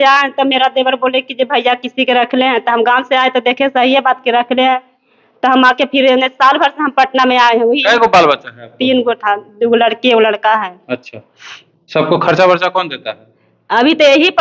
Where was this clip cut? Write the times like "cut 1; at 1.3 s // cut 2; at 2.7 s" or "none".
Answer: none